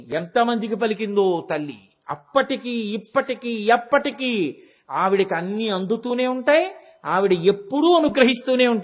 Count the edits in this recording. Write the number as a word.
zero